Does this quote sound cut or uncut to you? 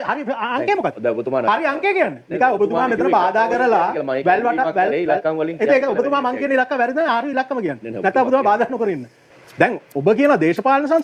cut